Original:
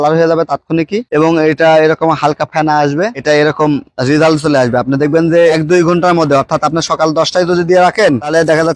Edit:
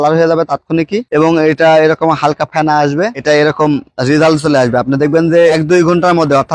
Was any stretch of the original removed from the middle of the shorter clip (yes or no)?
no